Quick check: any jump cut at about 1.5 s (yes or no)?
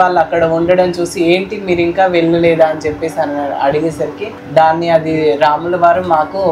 no